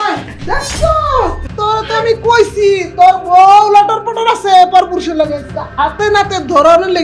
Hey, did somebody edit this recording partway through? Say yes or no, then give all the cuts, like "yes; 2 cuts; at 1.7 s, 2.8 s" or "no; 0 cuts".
yes; 1 cut; at 1.4 s